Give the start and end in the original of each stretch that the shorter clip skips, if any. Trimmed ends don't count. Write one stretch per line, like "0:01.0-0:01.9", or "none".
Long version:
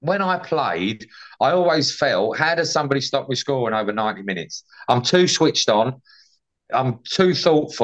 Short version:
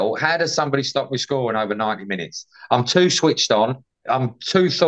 0:06.1-0:06.5